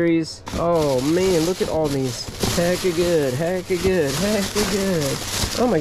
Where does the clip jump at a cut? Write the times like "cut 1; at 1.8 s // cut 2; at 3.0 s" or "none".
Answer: none